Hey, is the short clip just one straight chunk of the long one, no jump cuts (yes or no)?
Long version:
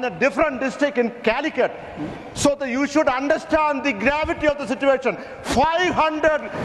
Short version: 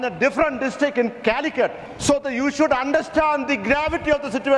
no